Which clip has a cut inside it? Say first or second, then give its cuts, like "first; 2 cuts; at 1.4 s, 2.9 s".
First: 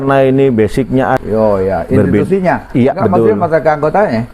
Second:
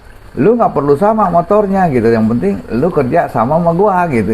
first; 1 cut; at 1.2 s